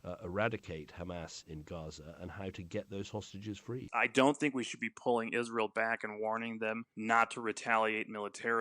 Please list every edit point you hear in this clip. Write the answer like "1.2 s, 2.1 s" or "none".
3.8 s